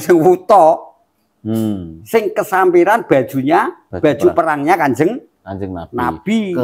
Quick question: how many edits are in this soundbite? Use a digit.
1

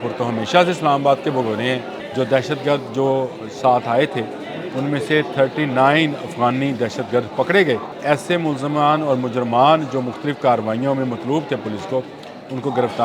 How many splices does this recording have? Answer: 2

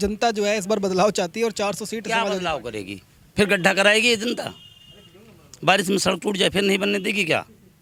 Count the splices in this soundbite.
0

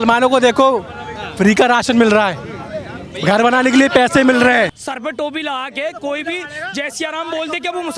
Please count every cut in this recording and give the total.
1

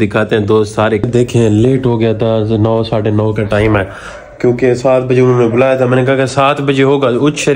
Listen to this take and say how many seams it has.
1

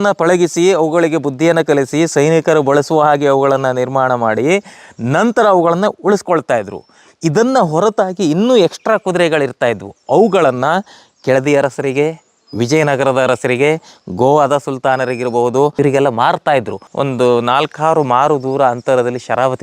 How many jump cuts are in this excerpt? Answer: 2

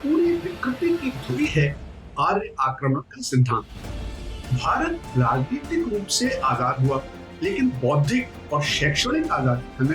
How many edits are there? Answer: 1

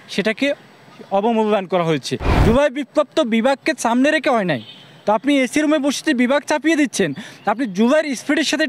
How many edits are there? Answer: 1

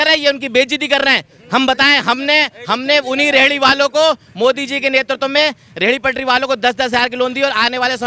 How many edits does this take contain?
0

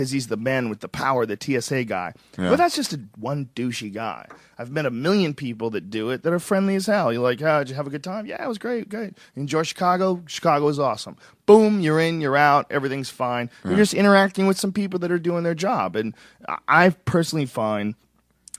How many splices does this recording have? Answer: 0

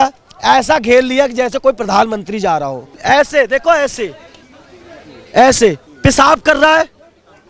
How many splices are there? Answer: 1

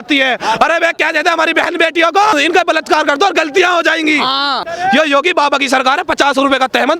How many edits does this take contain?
2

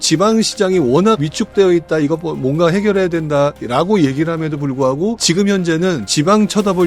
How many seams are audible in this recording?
0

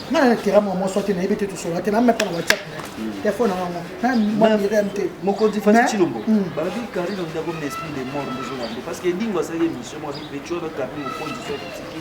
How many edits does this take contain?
0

